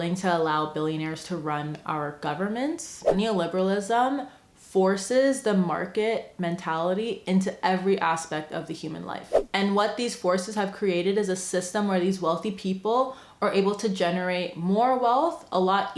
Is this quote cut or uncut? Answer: cut